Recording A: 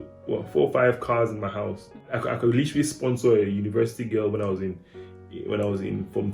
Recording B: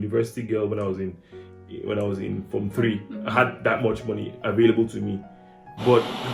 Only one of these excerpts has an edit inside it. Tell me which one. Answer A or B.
A